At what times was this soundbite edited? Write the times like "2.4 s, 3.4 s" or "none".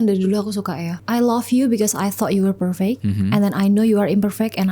1.0 s, 3.0 s

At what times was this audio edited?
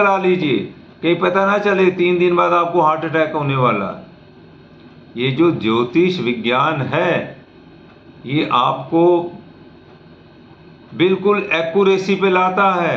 none

